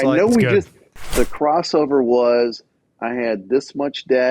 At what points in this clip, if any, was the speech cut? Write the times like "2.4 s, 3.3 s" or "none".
1.0 s